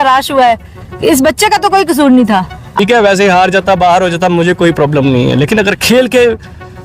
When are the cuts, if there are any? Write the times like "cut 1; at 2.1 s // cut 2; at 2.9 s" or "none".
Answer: cut 1; at 2.7 s